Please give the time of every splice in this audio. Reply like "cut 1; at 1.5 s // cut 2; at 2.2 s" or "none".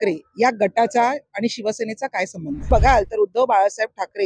cut 1; at 2.7 s